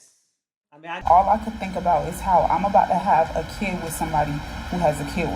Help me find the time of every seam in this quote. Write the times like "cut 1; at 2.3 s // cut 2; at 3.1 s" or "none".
cut 1; at 1.0 s